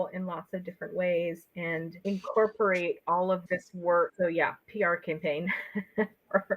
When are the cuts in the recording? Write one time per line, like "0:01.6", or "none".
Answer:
0:04.1